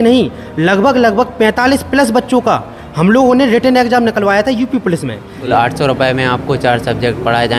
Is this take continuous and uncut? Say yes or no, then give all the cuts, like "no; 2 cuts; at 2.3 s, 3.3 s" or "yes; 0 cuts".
no; 1 cut; at 5.4 s